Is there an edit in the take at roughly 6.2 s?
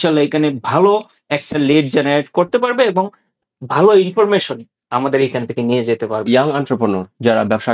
yes; 1 cut; at 6.2 s

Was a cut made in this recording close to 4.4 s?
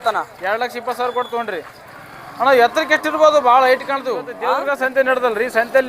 yes; 1 cut; at 4.4 s

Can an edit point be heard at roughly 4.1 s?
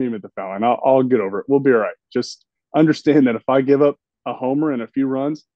no; 0 cuts

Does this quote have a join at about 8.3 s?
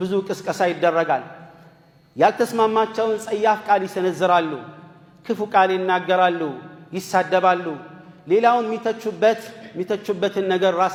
no; 0 cuts

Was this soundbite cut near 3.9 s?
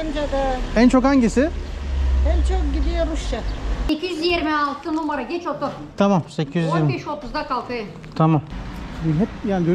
yes; 2 cuts; at 3.9 s, 8.6 s

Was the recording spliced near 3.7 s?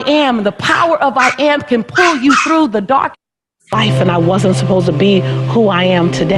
yes; 1 cut; at 3.7 s

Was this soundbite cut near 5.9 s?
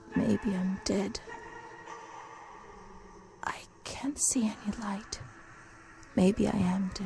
no; 2 cuts; at 1.2 s, 3.4 s

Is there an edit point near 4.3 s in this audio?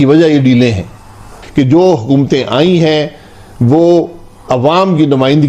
no; 1 cut; at 1.4 s

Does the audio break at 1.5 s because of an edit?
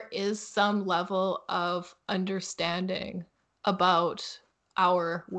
no; 0 cuts

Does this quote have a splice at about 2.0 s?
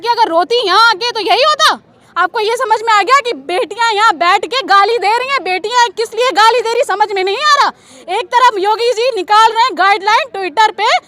yes; 1 cut; at 2.0 s

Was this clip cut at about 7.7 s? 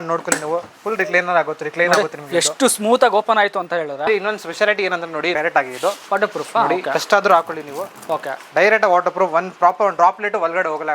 no; 2 cuts; at 4.1 s, 5.3 s

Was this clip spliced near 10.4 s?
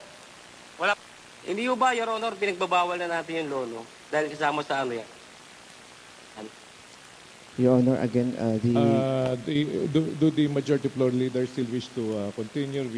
no; 1 cut; at 1.0 s

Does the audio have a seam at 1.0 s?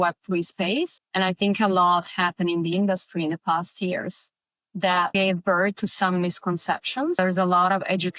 yes; 3 cuts; at 1.0 s, 5.1 s, 7.2 s

